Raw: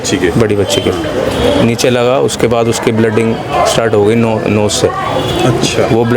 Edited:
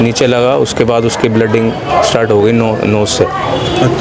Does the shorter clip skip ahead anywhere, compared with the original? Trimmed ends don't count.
no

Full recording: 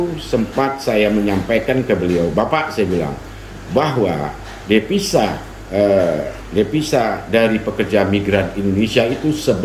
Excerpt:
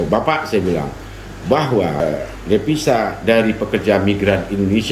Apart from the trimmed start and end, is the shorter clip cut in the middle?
yes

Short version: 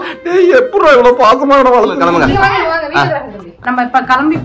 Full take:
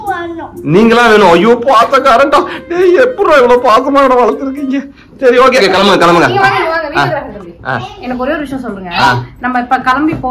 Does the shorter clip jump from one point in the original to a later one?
yes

